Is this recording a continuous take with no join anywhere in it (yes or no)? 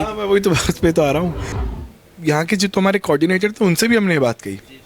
no